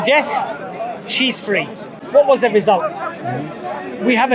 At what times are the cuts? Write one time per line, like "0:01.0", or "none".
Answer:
0:02.0